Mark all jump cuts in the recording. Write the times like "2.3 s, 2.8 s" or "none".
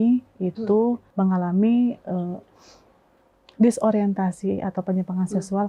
1.1 s

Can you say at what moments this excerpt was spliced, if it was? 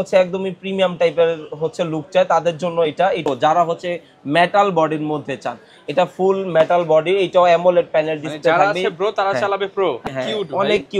3.2 s, 10.0 s

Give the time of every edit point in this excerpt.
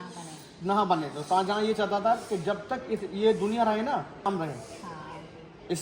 none

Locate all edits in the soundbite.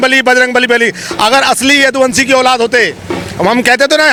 none

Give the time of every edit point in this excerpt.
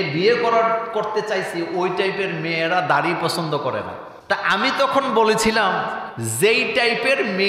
none

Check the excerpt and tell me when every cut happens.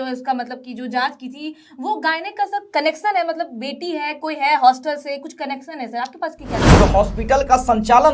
6.6 s

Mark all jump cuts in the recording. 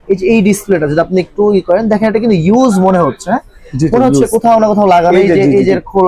none

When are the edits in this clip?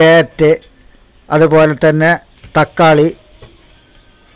none

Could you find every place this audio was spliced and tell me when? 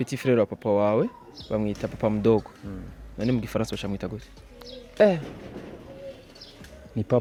none

